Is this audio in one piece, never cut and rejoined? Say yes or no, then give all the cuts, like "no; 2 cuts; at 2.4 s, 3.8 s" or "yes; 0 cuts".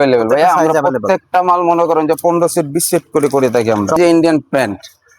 no; 1 cut; at 4.0 s